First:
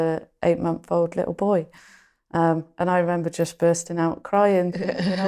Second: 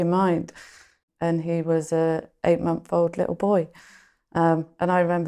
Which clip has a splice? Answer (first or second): second